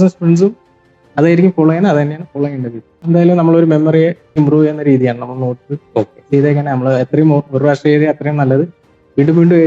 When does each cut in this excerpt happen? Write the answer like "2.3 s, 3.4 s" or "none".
3.0 s, 4.4 s